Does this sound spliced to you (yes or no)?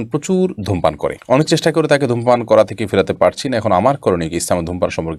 no